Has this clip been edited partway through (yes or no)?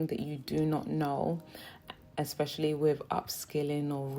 no